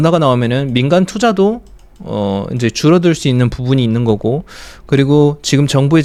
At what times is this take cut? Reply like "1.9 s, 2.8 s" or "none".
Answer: none